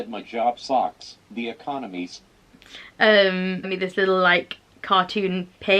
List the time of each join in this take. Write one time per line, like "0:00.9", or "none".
0:03.7